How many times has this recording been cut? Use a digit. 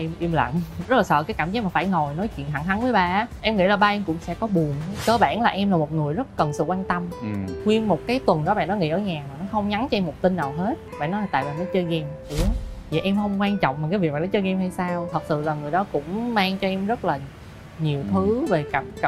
6